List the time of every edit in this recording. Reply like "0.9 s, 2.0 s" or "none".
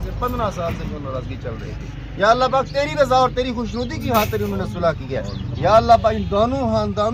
none